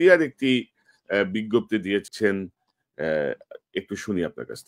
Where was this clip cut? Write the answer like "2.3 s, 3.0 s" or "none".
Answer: 2.1 s